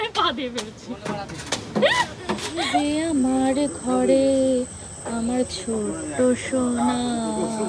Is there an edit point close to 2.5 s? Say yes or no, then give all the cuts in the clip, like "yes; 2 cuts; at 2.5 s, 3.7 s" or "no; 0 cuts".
yes; 1 cut; at 2.5 s